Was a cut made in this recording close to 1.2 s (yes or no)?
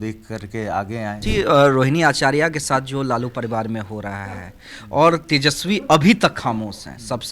yes